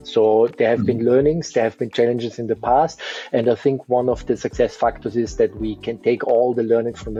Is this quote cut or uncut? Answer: uncut